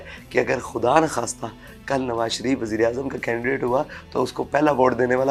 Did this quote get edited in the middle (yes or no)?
no